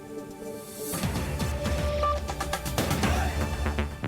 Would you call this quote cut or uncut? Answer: cut